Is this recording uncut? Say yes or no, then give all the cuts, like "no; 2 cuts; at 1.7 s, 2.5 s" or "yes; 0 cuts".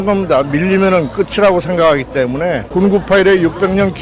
no; 1 cut; at 2.6 s